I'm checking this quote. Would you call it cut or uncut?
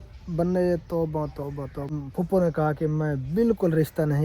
cut